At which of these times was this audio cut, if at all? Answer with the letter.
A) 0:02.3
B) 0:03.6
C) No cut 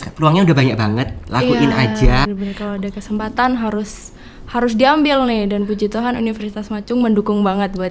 A